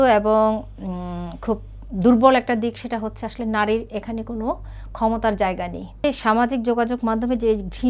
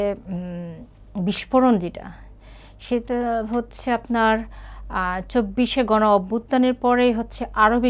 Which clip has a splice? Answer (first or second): first